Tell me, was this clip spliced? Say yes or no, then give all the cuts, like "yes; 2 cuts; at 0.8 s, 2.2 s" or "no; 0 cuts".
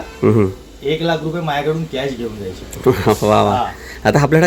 no; 0 cuts